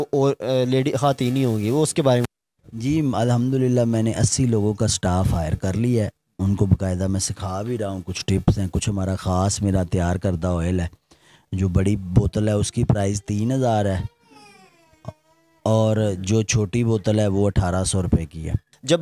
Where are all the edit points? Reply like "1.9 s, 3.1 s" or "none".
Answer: none